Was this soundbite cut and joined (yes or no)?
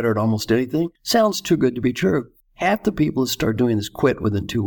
yes